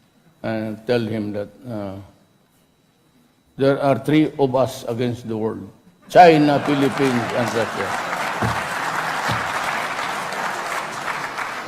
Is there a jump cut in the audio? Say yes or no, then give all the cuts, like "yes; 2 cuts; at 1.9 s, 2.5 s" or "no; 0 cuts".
yes; 1 cut; at 9.3 s